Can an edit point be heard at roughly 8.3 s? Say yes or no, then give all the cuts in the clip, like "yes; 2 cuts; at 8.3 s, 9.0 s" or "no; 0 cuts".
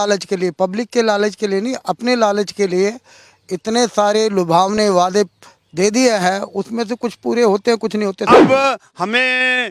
yes; 1 cut; at 8.3 s